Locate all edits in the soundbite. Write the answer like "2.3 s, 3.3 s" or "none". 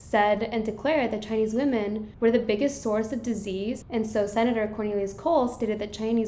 2.0 s